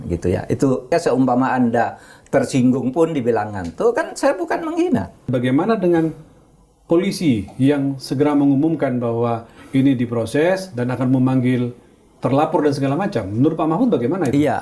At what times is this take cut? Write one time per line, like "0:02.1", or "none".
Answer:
0:00.9
0:05.3